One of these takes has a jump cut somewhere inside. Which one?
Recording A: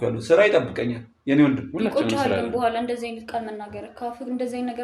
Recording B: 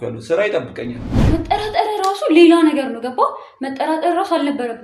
B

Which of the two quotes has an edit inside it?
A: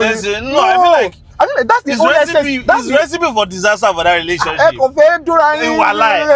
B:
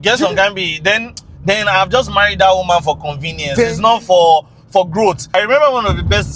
B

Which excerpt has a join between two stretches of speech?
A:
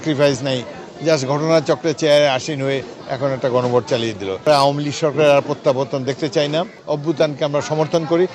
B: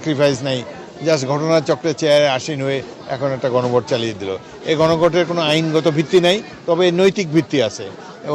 A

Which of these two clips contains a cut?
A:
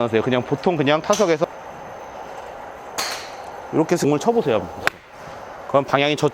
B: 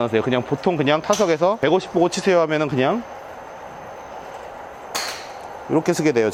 A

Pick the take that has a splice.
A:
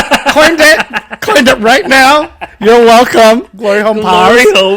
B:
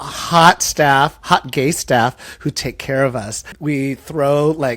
B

